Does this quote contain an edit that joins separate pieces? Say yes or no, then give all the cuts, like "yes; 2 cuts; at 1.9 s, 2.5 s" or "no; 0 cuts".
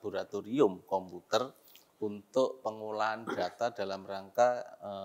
no; 0 cuts